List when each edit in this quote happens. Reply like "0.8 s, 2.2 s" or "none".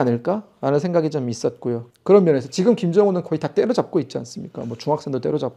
1.9 s